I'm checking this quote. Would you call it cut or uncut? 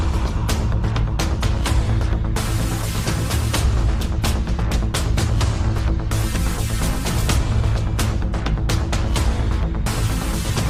uncut